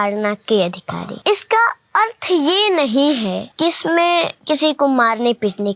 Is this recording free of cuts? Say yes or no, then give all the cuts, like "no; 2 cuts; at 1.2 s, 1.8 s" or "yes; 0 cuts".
no; 3 cuts; at 1.0 s, 3.5 s, 4.4 s